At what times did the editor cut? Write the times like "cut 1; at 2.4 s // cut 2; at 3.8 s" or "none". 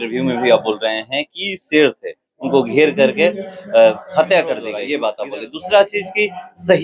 none

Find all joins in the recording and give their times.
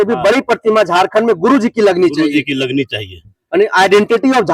none

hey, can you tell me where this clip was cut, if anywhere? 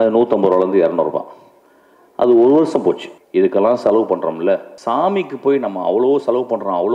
cut 1; at 3.1 s // cut 2; at 4.7 s

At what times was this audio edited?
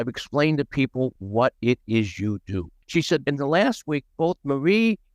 cut 1; at 1.2 s // cut 2; at 2.7 s

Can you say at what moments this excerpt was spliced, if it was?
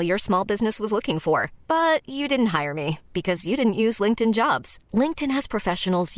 none

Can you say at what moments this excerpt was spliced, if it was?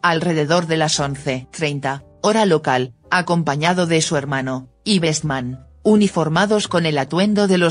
none

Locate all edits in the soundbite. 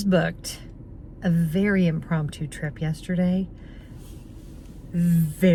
none

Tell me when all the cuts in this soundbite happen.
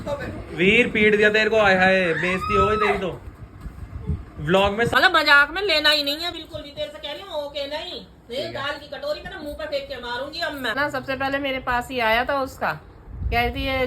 cut 1; at 4.9 s // cut 2; at 10.8 s

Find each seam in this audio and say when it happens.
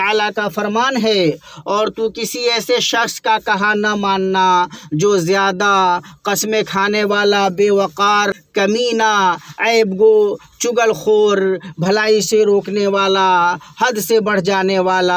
none

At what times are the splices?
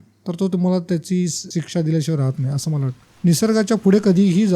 cut 1; at 1.4 s // cut 2; at 3.0 s

